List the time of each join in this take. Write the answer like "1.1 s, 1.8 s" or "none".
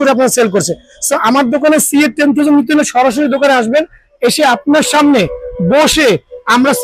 none